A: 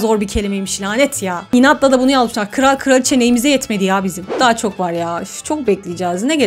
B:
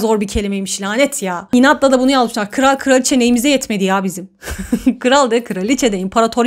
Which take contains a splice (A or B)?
A